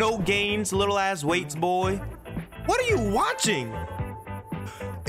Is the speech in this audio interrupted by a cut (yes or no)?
no